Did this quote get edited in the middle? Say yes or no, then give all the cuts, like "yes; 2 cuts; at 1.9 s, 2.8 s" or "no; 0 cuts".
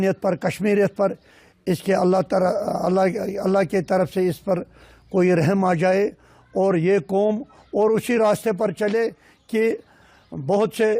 no; 0 cuts